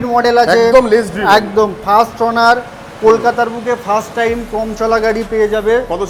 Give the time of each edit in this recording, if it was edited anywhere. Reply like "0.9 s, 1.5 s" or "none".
none

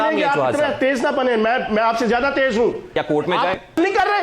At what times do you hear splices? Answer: 2.8 s

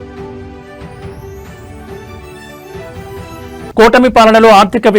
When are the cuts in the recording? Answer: 3.7 s

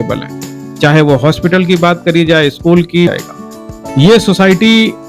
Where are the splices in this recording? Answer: 3.2 s

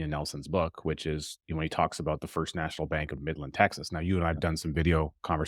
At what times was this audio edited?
none

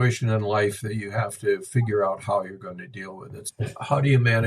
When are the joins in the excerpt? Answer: 3.4 s

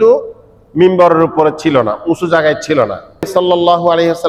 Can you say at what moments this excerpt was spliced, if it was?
3.3 s

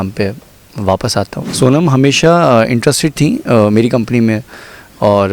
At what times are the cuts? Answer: 1.4 s

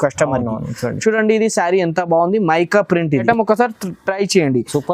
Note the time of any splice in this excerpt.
3.2 s

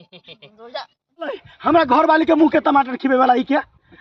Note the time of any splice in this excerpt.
1.5 s

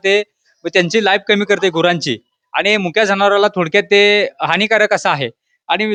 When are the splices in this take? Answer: none

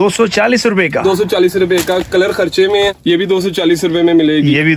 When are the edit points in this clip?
3.0 s

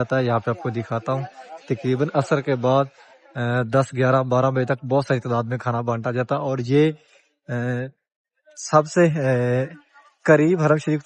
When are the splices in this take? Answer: none

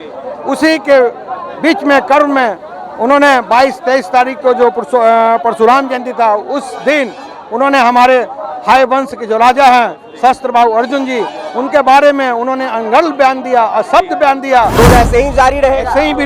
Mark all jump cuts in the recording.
14.8 s

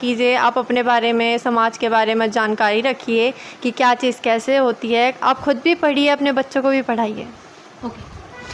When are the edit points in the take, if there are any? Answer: none

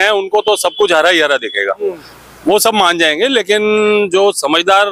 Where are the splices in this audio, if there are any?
none

